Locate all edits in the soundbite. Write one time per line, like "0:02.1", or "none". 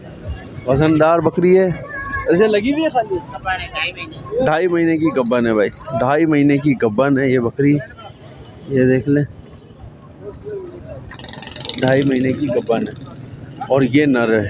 none